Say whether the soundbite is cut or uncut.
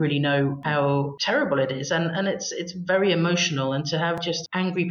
cut